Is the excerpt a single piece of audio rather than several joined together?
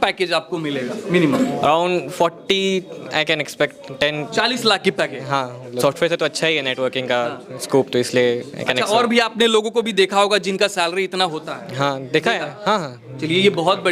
yes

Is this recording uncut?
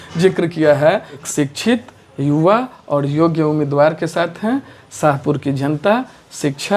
no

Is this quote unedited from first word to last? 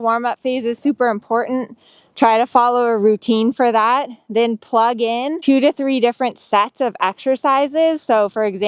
no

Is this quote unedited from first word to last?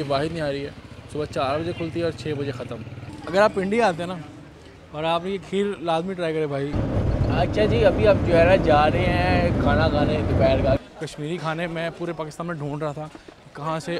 no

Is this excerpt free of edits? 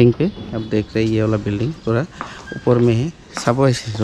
yes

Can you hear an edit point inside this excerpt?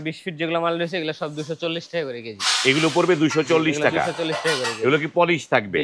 no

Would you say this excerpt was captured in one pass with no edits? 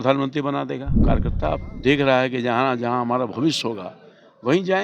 no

